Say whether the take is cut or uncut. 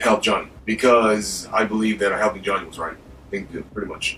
uncut